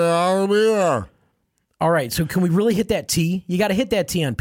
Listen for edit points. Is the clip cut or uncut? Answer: uncut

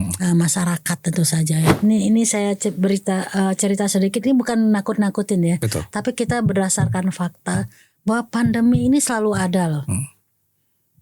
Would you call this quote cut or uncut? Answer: cut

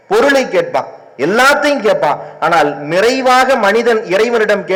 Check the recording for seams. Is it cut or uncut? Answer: uncut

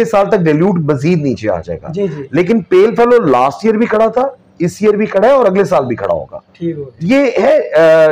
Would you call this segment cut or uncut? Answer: cut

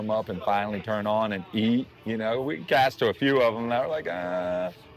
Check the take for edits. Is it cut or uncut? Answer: uncut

